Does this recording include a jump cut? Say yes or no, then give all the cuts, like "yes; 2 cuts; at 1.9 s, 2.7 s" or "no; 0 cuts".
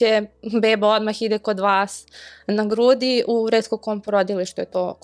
no; 0 cuts